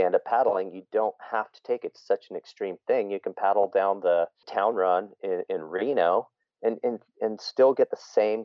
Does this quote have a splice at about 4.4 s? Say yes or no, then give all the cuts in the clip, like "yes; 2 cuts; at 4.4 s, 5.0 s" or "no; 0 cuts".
yes; 1 cut; at 4.4 s